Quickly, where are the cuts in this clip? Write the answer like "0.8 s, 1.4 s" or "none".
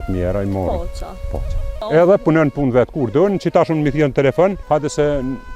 1.8 s, 4.6 s